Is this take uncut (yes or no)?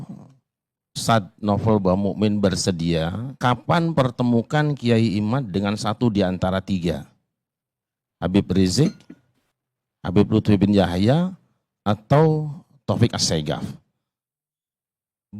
no